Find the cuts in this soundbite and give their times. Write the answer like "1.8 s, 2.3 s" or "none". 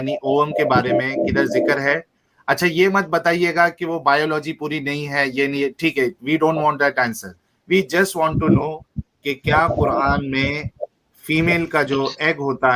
none